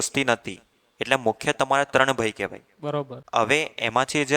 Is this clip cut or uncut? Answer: cut